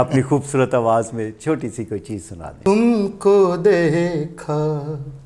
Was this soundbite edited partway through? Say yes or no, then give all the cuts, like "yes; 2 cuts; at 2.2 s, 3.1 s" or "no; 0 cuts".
yes; 1 cut; at 2.6 s